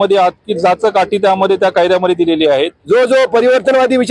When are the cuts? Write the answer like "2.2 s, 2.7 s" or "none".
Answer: 2.8 s